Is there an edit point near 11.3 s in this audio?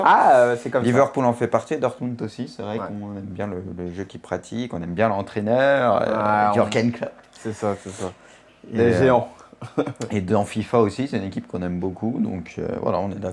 no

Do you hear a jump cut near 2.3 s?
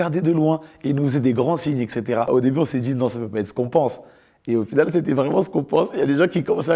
yes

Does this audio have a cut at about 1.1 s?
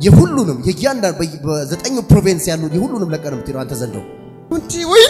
no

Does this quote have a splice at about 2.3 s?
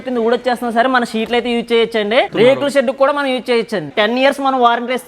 yes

